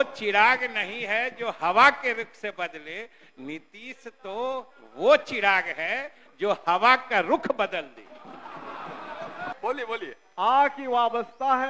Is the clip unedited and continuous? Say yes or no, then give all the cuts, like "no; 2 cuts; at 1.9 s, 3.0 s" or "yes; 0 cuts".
yes; 0 cuts